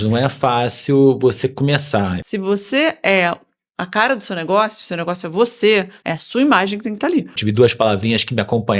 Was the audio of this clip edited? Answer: yes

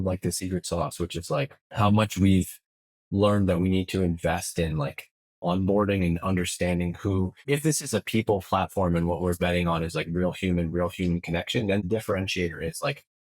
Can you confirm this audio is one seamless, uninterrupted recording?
no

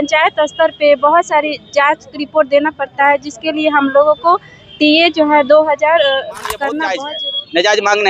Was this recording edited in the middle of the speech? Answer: yes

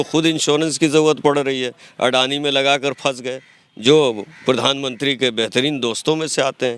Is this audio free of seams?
yes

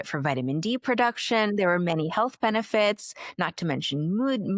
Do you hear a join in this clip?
no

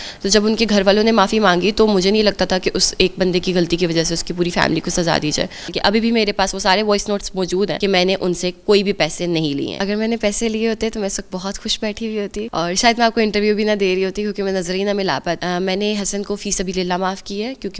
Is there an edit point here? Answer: yes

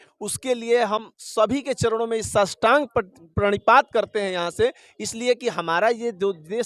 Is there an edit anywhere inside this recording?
no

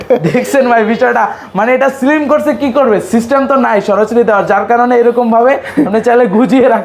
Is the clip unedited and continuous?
yes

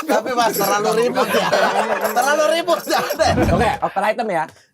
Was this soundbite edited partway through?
yes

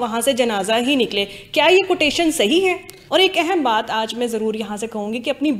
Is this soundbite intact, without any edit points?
no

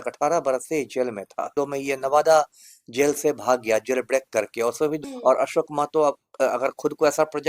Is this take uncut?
no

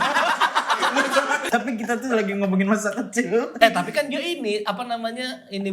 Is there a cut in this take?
yes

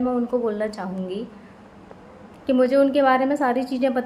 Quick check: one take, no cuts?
yes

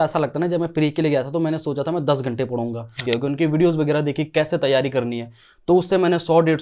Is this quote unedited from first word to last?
no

